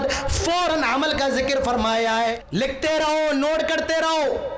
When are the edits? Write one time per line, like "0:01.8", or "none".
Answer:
0:02.4